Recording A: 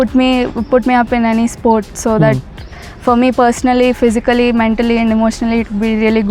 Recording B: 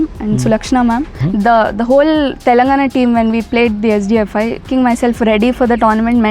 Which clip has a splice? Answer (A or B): B